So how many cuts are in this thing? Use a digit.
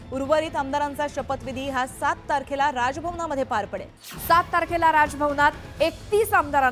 1